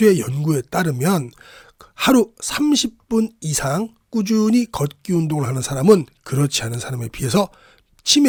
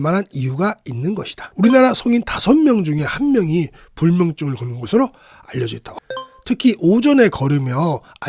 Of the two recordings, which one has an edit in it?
second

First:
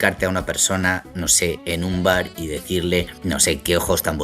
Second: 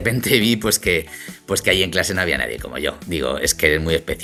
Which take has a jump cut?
first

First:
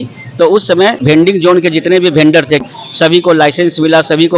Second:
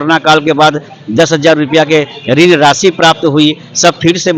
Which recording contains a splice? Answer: first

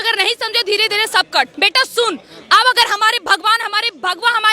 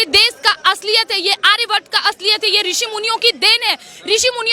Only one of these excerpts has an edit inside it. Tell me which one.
first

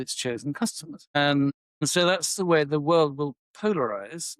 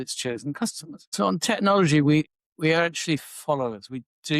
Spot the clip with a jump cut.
second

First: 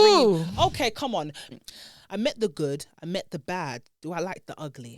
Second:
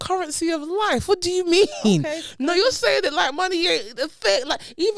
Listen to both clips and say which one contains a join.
first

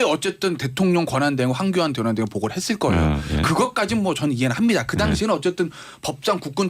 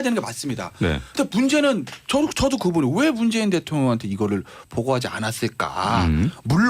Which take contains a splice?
second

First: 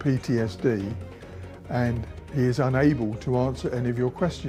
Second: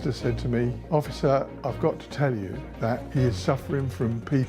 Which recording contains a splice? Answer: second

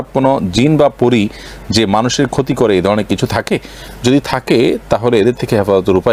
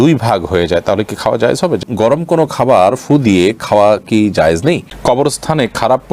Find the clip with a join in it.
second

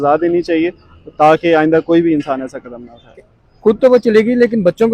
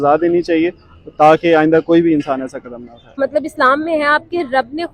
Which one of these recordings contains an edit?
second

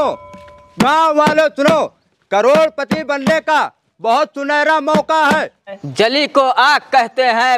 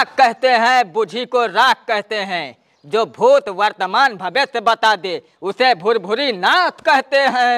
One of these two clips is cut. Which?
first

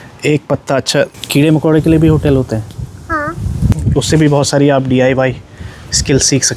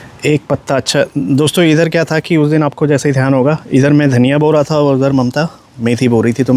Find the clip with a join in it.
first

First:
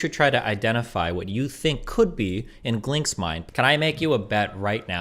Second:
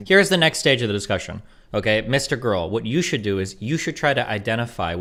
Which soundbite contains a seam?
first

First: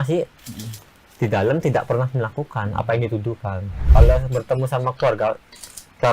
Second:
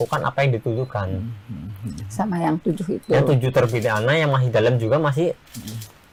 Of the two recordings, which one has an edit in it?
first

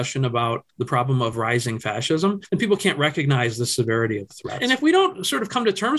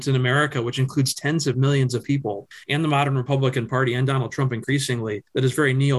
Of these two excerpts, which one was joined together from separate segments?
first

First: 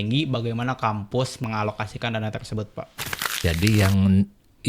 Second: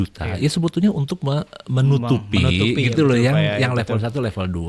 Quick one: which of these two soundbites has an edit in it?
first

